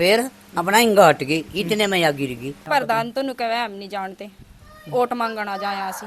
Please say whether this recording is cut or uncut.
cut